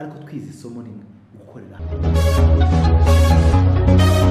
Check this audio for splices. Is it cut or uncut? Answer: cut